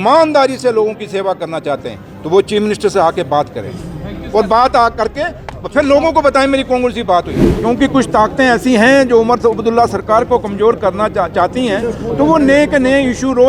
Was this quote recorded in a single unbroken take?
no; 1 cut; at 7.4 s

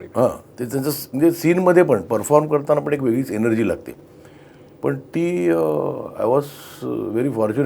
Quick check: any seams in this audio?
no; 0 cuts

